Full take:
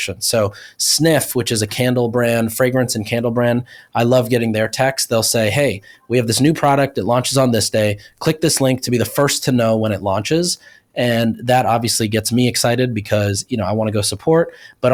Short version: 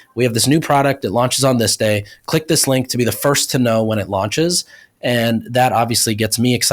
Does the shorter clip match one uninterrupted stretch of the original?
yes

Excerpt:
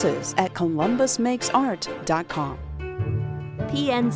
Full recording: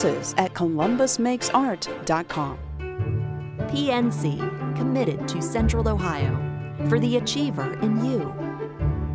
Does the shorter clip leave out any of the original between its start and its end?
no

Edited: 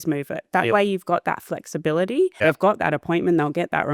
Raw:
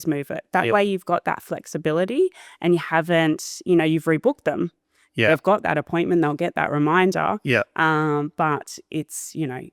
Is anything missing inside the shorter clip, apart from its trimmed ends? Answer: yes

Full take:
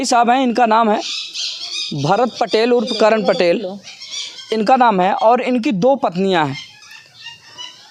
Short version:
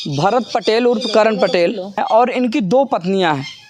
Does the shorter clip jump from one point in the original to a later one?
yes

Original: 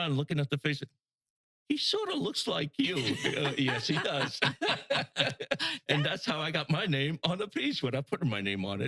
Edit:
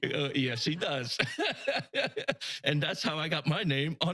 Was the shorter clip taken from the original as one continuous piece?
yes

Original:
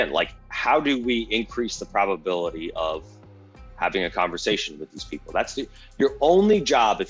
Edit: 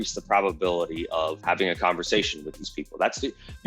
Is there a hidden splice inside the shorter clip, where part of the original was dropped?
yes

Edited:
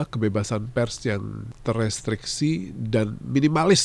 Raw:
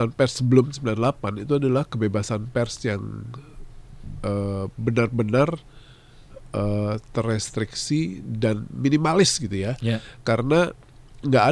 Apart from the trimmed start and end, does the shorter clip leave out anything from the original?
yes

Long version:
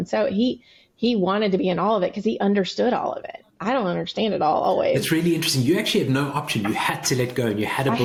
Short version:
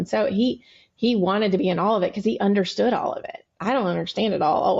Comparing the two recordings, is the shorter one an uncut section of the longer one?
yes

